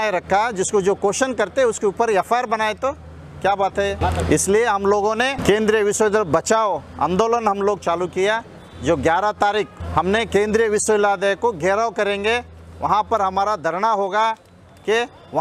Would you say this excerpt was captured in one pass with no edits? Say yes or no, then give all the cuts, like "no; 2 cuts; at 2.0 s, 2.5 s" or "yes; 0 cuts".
no; 3 cuts; at 4.0 s, 5.4 s, 9.8 s